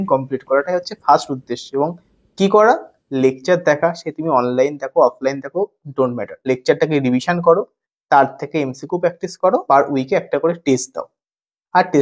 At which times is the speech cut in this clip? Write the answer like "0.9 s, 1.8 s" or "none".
6.3 s, 9.6 s